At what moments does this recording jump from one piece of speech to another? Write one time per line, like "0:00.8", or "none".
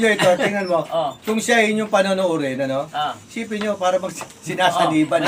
none